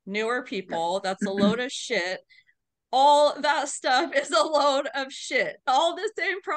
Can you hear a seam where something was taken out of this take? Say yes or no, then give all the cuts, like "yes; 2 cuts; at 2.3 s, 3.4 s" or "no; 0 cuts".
no; 0 cuts